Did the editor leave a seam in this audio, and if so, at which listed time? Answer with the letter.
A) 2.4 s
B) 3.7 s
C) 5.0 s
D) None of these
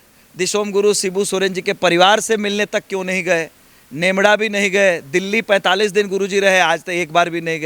D